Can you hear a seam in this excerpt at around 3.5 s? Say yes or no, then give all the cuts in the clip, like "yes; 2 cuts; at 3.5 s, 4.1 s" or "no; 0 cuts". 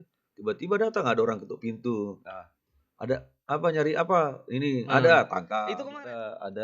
no; 1 cut; at 5.5 s